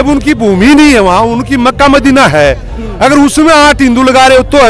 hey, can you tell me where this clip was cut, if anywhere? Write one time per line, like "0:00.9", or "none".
none